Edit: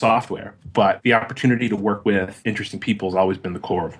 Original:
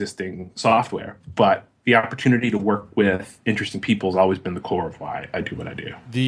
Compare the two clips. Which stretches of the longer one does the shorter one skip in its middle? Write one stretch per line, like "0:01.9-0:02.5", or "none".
0:01.6-0:01.8
0:02.9-0:03.1